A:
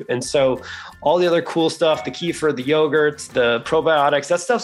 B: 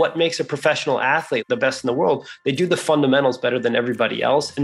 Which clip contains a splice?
B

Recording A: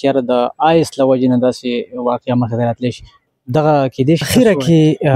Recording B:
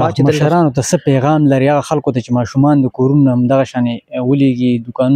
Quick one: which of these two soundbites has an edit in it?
A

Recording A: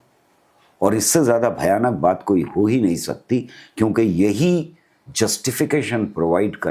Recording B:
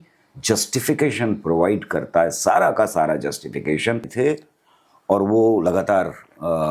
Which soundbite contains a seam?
B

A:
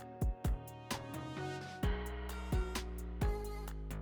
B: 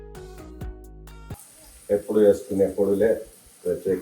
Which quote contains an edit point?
B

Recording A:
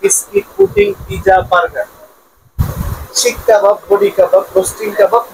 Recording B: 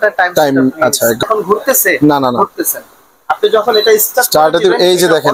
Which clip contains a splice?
B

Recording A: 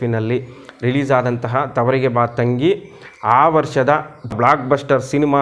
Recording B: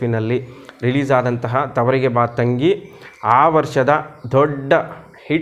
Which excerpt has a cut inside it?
A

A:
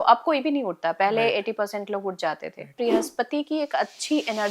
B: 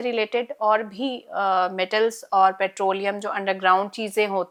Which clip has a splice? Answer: A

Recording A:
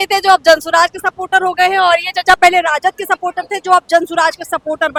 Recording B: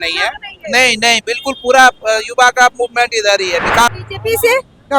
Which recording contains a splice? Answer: B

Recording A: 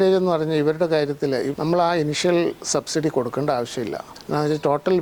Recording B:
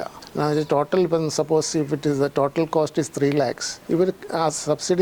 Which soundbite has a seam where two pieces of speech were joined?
A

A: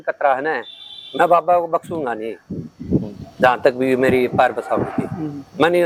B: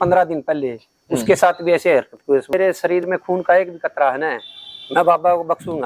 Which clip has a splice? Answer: B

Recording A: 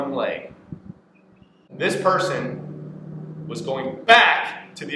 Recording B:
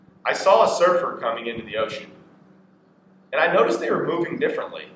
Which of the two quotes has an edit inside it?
A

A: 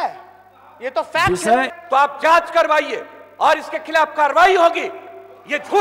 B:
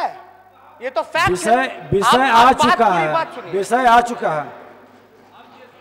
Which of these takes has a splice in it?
A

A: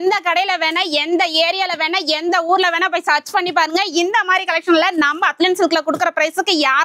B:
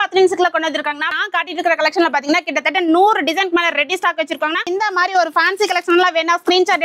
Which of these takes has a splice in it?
B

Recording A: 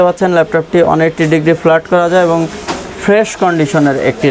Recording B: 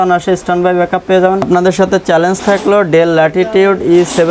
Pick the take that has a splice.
B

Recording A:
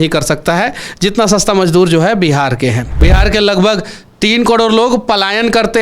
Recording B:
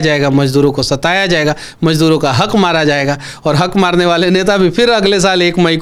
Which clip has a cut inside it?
A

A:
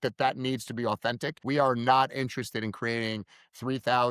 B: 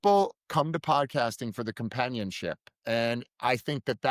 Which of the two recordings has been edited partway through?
A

